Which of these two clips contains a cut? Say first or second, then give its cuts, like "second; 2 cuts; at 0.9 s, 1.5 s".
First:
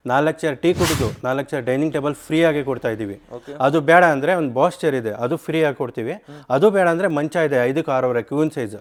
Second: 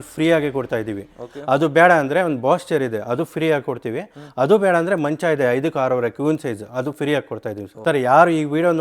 second; 1 cut; at 7.8 s